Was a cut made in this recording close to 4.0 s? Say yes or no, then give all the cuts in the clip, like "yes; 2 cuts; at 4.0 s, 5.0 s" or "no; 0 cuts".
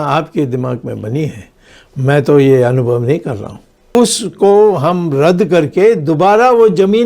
yes; 1 cut; at 4.0 s